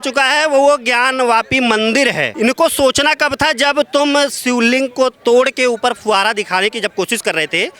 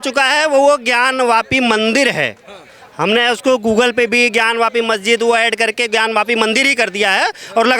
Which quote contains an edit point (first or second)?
first